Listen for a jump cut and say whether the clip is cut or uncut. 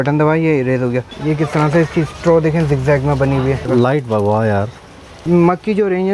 cut